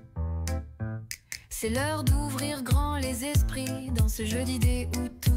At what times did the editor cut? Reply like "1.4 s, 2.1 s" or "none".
none

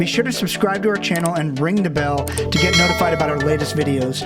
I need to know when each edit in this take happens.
none

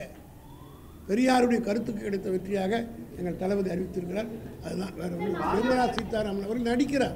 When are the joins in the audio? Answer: 5.5 s

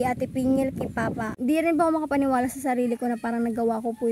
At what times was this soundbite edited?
1.3 s

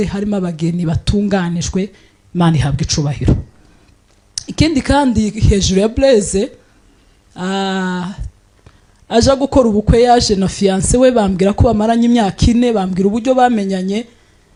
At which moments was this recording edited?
none

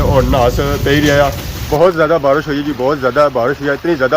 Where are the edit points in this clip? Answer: 1.5 s

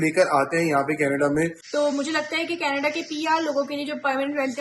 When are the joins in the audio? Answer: 1.6 s

